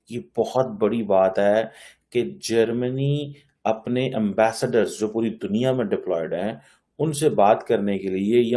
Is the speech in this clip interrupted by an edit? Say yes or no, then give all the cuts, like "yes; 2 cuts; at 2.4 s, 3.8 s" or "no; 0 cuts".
no; 0 cuts